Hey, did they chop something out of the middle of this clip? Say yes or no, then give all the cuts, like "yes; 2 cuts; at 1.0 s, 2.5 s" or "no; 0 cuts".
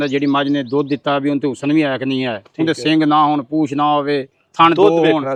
no; 0 cuts